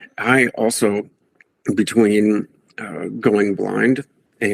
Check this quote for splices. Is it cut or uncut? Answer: uncut